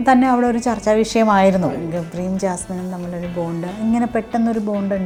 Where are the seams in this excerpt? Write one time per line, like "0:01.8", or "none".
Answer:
none